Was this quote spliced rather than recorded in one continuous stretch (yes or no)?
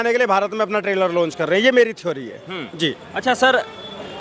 no